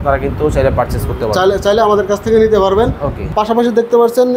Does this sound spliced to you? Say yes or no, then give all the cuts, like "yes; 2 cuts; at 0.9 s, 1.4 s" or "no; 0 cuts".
yes; 1 cut; at 3.2 s